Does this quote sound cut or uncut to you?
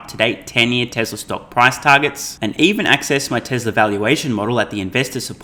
uncut